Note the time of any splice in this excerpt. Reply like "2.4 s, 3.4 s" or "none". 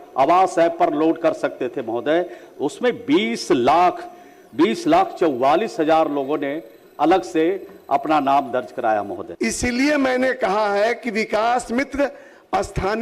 9.2 s